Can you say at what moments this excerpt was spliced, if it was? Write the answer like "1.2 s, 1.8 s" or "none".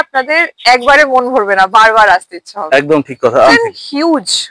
3.5 s